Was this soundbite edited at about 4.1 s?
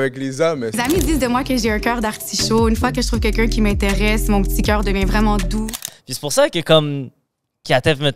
no; 2 cuts; at 0.8 s, 5.8 s

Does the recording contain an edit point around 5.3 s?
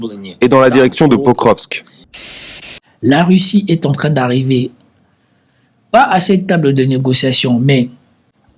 no; 1 cut; at 2.4 s

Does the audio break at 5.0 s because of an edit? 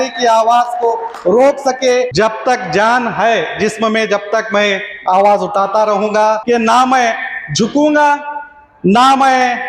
no; 2 cuts; at 2.1 s, 6.4 s

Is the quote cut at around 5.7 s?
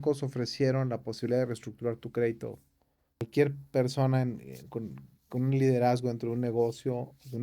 no; 1 cut; at 3.3 s

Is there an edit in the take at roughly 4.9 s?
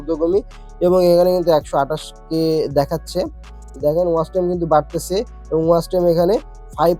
no; 1 cut; at 3.6 s

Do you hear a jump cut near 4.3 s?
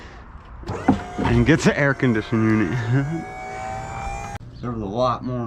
yes; 1 cut; at 4.3 s

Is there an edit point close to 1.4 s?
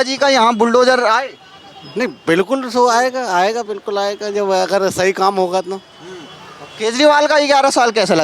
no; 0 cuts

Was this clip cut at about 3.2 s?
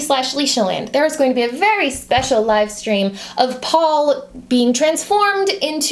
yes; 1 cut; at 3.2 s

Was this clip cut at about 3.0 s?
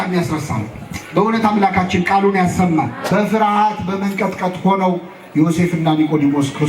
yes; 1 cut; at 3.0 s

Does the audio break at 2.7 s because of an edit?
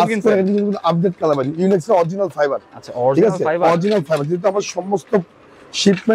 no; 0 cuts

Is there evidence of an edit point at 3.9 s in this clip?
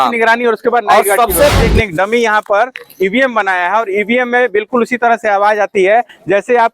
no; 1 cut; at 1.5 s

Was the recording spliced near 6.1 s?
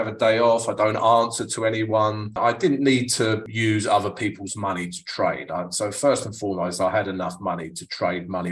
no; 2 cuts; at 2.3 s, 3.4 s

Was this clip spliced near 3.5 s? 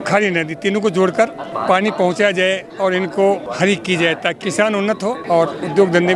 yes; 3 cuts; at 1.5 s, 3.5 s, 4.9 s

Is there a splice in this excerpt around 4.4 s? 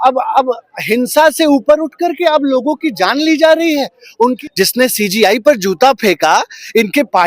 yes; 1 cut; at 4.4 s

